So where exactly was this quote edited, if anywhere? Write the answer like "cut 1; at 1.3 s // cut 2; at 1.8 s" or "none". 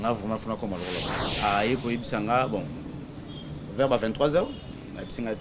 cut 1; at 1.2 s